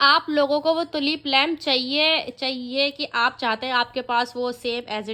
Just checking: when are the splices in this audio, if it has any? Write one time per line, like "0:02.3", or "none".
none